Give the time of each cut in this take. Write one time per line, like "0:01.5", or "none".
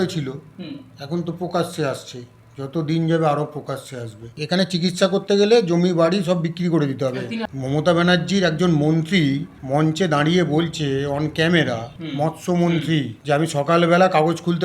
0:04.3
0:07.4
0:09.5
0:12.0
0:13.1